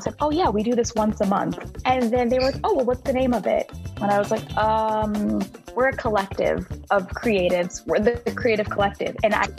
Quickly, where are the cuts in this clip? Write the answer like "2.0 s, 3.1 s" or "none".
none